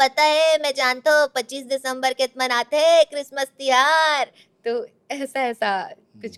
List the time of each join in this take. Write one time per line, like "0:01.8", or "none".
none